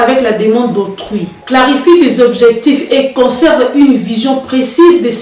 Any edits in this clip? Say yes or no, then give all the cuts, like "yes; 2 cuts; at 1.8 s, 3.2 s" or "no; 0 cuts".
yes; 1 cut; at 1.3 s